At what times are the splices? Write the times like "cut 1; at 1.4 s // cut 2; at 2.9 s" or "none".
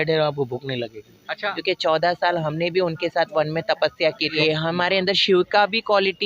cut 1; at 1.5 s // cut 2; at 4.4 s